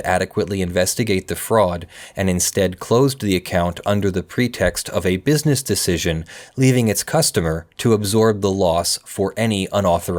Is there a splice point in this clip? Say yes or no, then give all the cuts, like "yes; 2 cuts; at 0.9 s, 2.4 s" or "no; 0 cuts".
no; 0 cuts